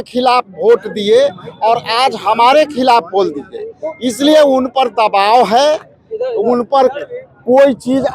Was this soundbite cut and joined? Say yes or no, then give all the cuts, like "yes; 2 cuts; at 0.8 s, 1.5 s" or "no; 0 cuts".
no; 0 cuts